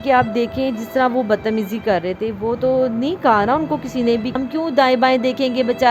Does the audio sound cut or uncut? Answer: cut